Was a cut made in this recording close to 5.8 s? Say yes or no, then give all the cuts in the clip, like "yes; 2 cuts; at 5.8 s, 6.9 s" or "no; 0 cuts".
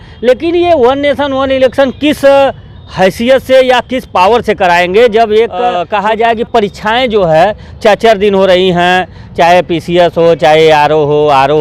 yes; 1 cut; at 5.8 s